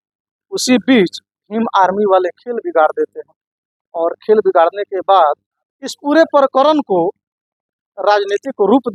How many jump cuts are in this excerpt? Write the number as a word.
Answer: zero